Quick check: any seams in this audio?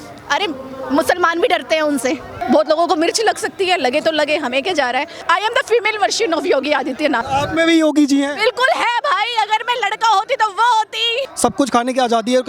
yes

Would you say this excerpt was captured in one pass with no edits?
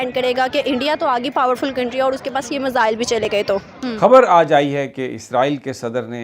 no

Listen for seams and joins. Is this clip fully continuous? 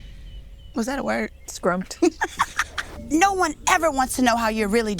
no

